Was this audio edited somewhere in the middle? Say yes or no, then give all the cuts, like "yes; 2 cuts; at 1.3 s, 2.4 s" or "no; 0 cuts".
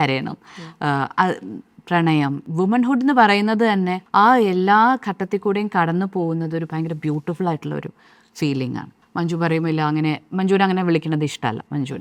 yes; 3 cuts; at 2.4 s, 4.0 s, 8.9 s